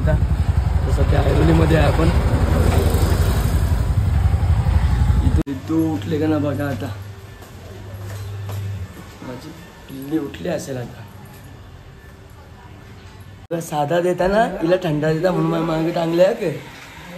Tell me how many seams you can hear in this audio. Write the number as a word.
two